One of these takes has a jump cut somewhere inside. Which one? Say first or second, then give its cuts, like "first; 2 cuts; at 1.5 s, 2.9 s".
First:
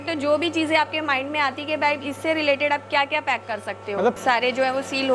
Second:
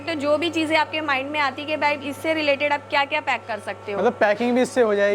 first; 1 cut; at 4.2 s